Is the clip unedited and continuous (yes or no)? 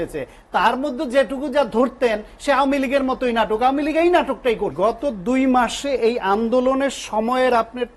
no